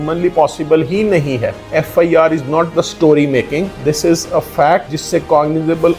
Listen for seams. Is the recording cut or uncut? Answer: cut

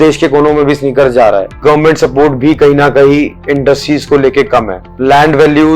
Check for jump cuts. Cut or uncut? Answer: cut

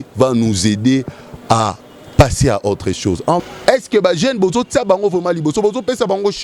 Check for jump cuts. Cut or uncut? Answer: cut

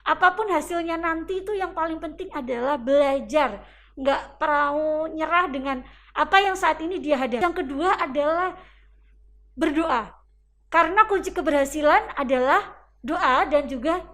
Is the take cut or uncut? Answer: cut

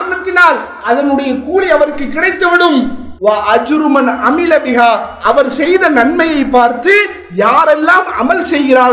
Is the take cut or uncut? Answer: cut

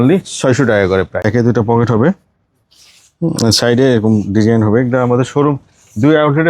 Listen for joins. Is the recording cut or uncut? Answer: cut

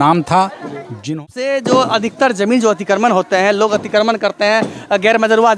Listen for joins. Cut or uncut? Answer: cut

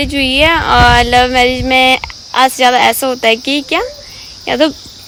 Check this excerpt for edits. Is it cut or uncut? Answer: uncut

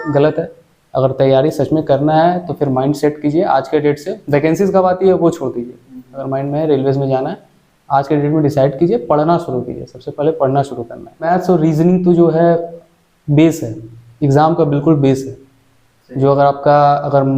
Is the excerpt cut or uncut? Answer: cut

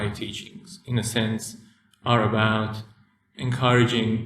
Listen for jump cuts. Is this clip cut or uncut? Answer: cut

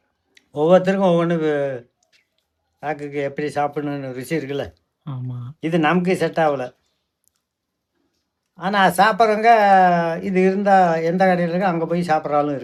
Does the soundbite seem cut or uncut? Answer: uncut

